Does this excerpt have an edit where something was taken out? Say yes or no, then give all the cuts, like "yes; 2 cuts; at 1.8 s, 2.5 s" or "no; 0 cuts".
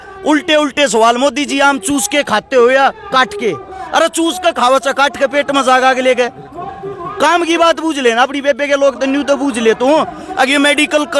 no; 0 cuts